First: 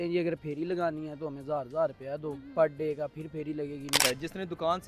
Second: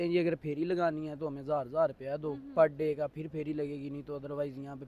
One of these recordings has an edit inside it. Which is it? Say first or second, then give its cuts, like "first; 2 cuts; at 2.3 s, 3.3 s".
first; 1 cut; at 3.9 s